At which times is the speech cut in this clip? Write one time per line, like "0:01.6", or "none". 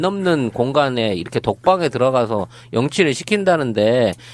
0:01.0